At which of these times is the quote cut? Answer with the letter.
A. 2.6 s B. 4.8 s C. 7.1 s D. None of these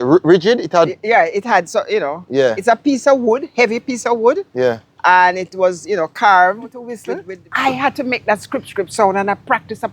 C